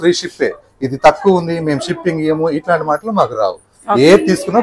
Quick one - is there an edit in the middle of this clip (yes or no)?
no